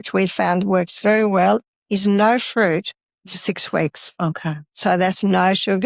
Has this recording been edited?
no; 0 cuts

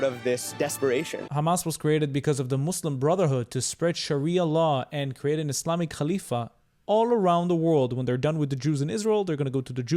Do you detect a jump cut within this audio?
yes; 1 cut; at 1.2 s

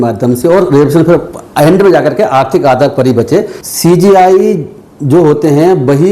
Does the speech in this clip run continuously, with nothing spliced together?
no; 1 cut; at 3.6 s

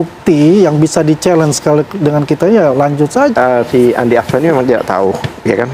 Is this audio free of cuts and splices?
no; 1 cut; at 3.3 s

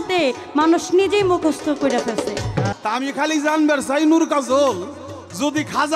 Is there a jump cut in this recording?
yes; 1 cut; at 2.7 s

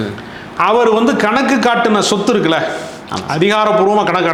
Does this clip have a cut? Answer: no; 0 cuts

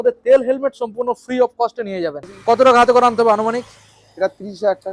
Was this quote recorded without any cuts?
no; 1 cut; at 2.3 s

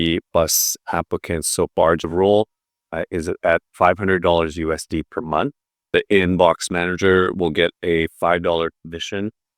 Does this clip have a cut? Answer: yes; 2 cuts; at 2.0 s, 5.9 s

